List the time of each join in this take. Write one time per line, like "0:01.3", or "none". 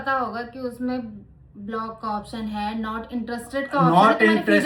none